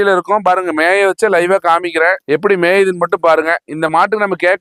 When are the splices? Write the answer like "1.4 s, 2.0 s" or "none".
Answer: none